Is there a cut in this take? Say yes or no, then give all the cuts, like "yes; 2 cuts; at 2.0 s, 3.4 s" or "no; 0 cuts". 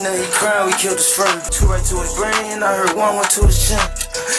yes; 1 cut; at 1.5 s